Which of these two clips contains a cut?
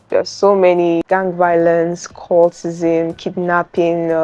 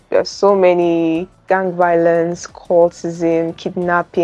first; 1 cut; at 1.0 s

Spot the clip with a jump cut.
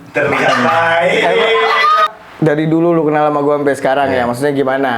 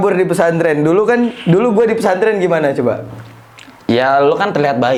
first; 1 cut; at 2.1 s

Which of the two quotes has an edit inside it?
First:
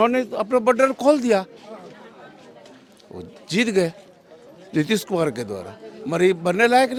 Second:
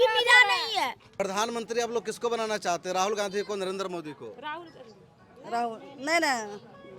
second; 1 cut; at 1.0 s

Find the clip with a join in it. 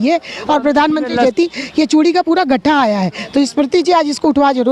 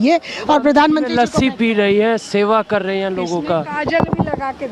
first; 1 cut; at 1.2 s

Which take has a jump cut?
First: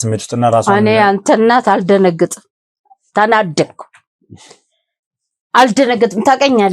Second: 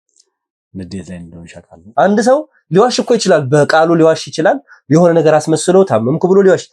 second; 1 cut; at 1.8 s

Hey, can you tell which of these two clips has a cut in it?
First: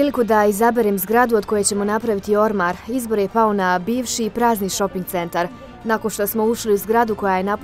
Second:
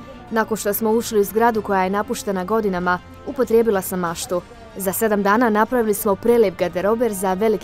second; 1 cut; at 4.6 s

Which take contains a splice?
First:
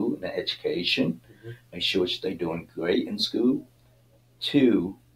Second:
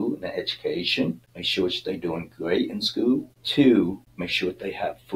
second; 3 cuts; at 1.3 s, 3.4 s, 4.1 s

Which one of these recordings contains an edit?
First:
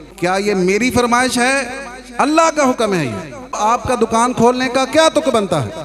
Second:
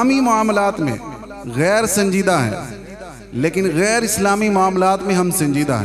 first; 1 cut; at 3.6 s

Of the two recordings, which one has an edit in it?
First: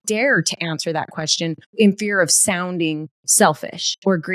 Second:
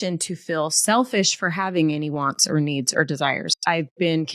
first; 2 cuts; at 1.7 s, 3.2 s

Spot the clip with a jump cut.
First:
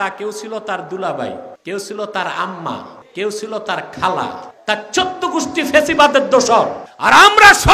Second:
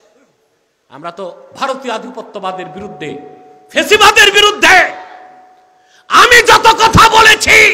first; 4 cuts; at 1.5 s, 3.0 s, 4.5 s, 6.9 s

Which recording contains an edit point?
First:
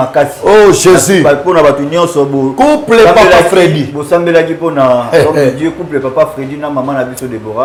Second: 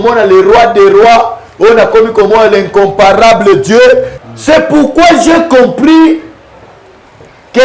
second; 1 cut; at 4.2 s

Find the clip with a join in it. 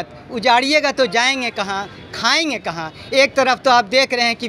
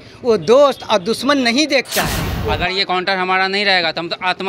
second; 1 cut; at 2.3 s

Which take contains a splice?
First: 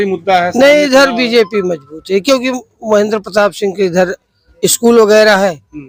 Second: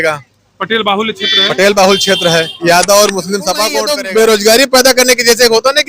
second; 1 cut; at 3.9 s

